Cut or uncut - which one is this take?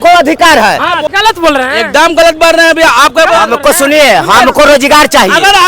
cut